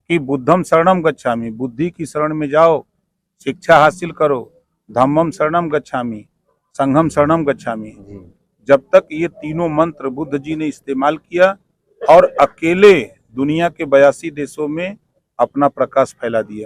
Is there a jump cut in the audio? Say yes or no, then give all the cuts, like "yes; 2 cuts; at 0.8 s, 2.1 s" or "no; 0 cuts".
no; 0 cuts